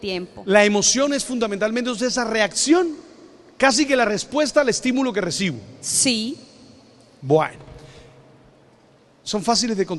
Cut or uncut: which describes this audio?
uncut